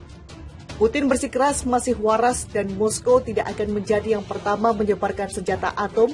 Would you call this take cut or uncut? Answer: uncut